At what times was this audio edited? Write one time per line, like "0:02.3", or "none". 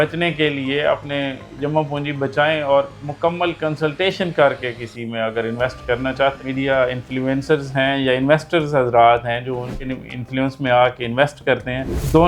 0:06.4
0:09.8